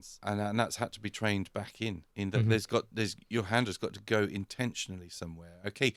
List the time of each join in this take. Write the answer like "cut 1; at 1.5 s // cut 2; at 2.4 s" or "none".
none